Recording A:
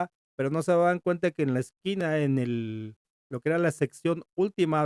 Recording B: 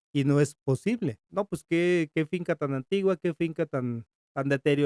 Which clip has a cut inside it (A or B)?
B